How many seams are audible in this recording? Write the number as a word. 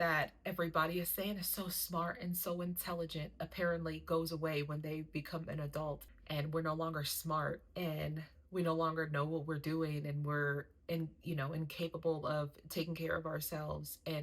one